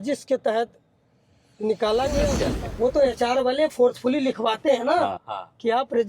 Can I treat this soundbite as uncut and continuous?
no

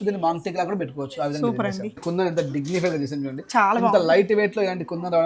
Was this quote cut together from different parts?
yes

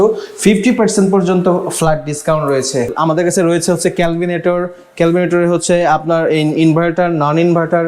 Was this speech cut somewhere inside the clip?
yes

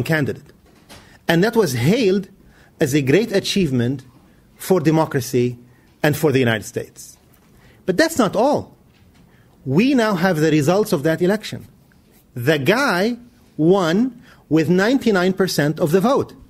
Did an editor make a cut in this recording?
yes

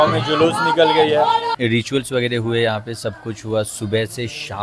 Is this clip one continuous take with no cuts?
no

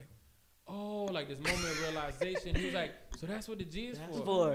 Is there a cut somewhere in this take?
no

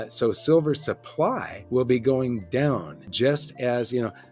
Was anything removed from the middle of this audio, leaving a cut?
yes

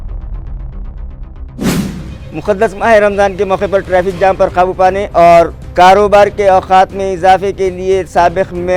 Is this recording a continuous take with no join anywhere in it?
yes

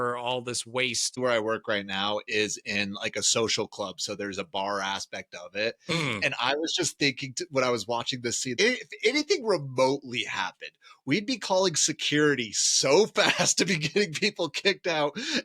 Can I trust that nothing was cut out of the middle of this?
no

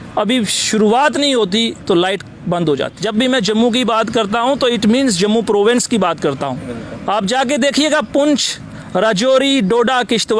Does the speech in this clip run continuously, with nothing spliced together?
no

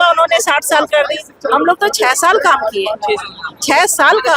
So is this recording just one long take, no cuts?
yes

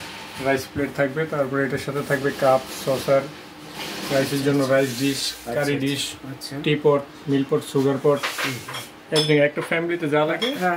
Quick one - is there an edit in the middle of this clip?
no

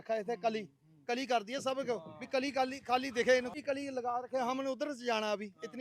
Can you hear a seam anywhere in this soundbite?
yes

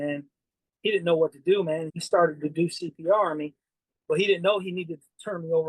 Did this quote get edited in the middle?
yes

